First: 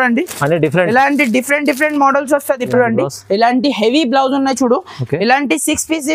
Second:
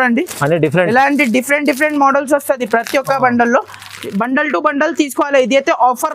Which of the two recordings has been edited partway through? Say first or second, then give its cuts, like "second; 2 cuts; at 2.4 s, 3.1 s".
first; 1 cut; at 2.7 s